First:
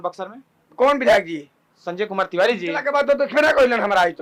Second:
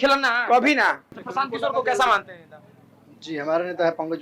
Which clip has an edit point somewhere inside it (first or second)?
second